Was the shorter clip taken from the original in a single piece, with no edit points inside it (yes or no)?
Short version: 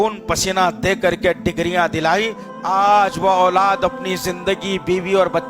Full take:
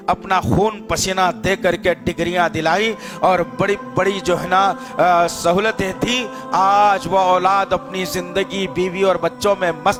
no